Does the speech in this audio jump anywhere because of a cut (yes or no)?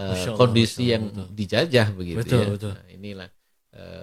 no